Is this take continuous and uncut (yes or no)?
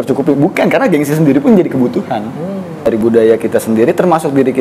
no